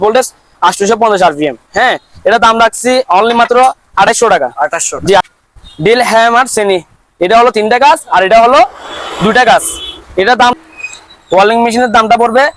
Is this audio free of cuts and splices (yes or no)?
no